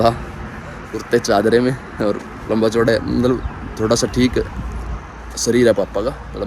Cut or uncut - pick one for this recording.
uncut